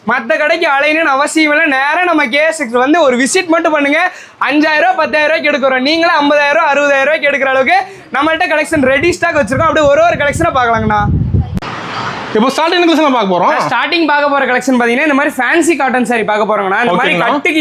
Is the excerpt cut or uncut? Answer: uncut